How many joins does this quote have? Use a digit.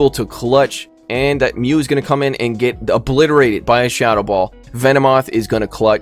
2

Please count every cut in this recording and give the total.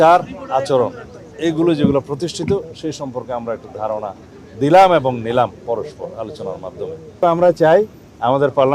1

